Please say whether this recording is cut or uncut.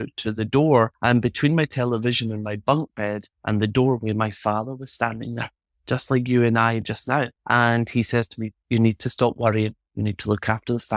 cut